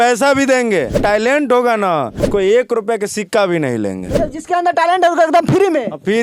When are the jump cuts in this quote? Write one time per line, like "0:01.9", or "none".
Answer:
0:01.0
0:02.2